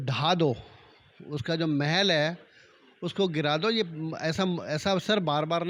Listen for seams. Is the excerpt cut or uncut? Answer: uncut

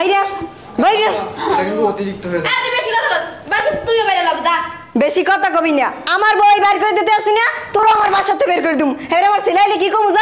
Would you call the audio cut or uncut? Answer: uncut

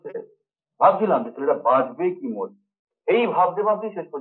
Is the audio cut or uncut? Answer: uncut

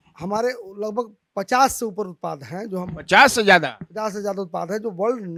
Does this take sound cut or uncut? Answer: uncut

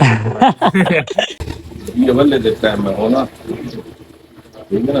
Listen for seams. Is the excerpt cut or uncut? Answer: cut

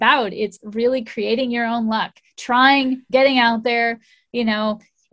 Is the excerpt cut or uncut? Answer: uncut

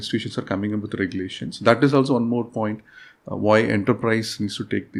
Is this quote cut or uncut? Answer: uncut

